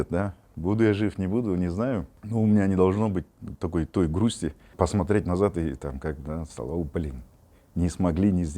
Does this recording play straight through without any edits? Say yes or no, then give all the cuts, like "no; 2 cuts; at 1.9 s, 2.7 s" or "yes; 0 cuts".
no; 2 cuts; at 2.2 s, 4.7 s